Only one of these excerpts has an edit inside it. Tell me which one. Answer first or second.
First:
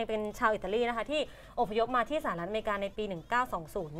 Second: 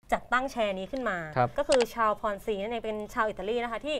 second